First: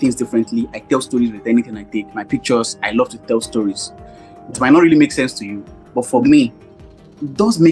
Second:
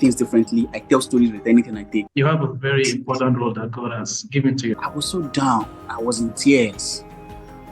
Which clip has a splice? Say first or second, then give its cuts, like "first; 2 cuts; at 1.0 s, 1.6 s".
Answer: second; 2 cuts; at 2.1 s, 4.7 s